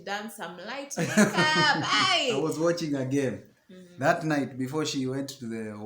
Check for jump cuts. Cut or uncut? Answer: cut